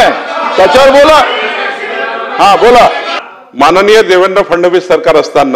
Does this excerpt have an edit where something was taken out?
yes; 1 cut; at 3.1 s

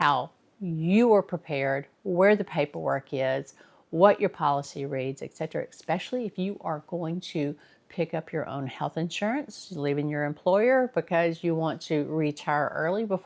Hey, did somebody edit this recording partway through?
no; 0 cuts

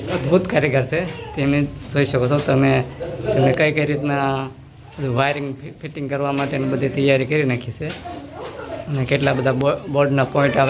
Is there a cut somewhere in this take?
no; 0 cuts

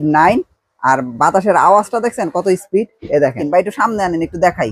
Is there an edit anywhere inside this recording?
yes; 1 cut; at 3.4 s

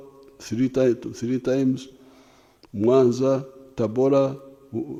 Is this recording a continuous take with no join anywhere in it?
yes; 0 cuts

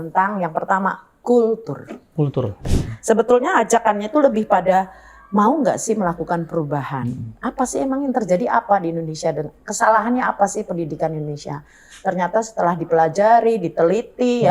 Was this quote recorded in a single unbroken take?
no; 1 cut; at 2.7 s

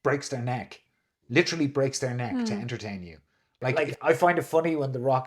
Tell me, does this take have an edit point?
yes; 1 cut; at 3.7 s

